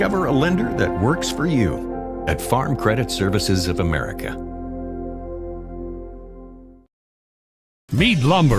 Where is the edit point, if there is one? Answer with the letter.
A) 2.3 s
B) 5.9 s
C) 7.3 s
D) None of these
C